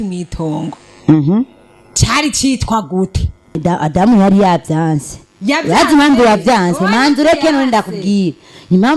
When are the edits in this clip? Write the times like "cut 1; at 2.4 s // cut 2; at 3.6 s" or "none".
cut 1; at 3.6 s